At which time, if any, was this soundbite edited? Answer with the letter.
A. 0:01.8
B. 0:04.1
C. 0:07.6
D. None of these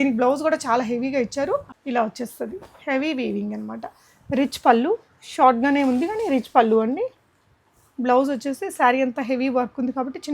A